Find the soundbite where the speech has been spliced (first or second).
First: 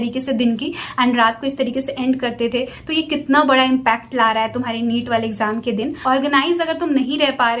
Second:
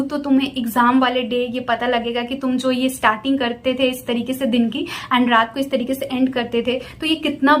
first